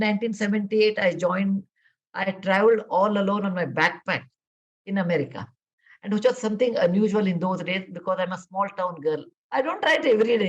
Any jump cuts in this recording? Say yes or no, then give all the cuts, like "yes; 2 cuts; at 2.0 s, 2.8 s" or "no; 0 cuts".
yes; 1 cut; at 9.4 s